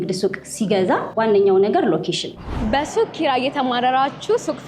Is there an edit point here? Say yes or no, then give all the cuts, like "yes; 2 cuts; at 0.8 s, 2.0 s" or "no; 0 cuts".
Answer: yes; 2 cuts; at 1.1 s, 2.4 s